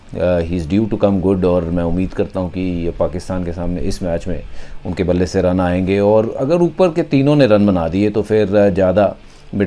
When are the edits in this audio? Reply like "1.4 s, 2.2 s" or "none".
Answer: none